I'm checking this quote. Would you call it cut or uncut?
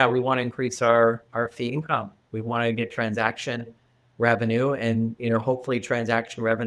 uncut